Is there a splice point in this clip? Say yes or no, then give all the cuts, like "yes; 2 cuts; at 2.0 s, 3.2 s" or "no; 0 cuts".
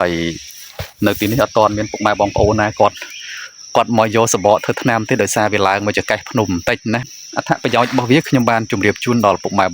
yes; 1 cut; at 7.2 s